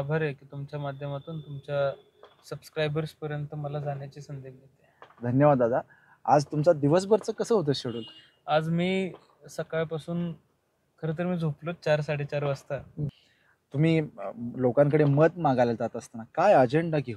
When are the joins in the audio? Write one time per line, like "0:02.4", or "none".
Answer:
0:13.1